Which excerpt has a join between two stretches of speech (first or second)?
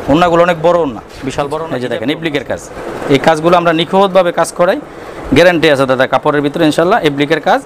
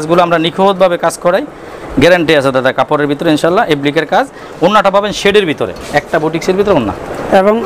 first